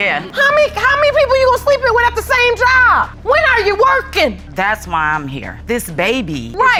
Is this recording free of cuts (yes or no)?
yes